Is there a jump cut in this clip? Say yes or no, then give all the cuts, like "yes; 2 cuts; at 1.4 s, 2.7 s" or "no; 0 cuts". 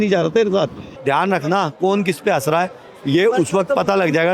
yes; 1 cut; at 0.9 s